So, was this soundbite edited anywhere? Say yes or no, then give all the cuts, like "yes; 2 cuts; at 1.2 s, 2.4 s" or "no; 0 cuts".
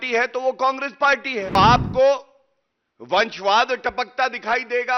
yes; 1 cut; at 1.5 s